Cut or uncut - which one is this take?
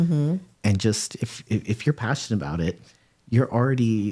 uncut